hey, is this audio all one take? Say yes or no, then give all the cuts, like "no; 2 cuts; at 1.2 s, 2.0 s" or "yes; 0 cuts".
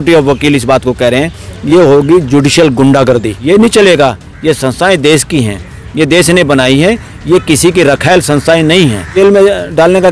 no; 2 cuts; at 3.3 s, 9.1 s